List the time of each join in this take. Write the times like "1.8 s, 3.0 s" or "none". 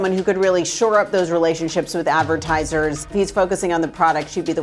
3.1 s

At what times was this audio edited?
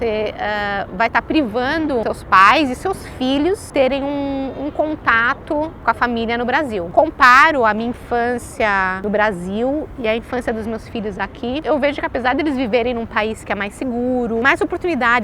2.0 s, 3.7 s, 5.8 s, 6.9 s, 9.0 s, 11.6 s, 14.4 s

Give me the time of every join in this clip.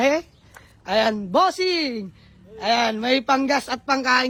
none

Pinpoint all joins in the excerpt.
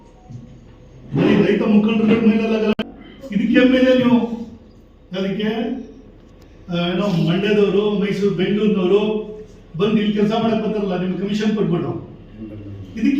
2.7 s

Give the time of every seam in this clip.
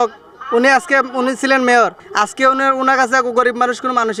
none

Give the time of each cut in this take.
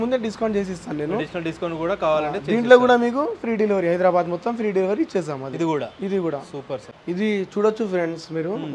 6.9 s

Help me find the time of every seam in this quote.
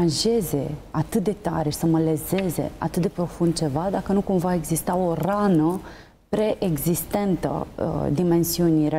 none

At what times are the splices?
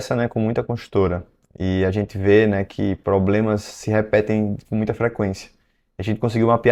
none

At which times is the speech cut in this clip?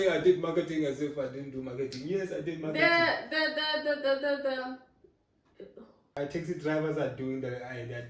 6.1 s

